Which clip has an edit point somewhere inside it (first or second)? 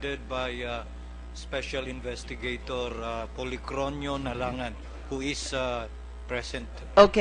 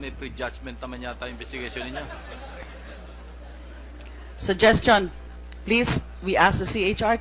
first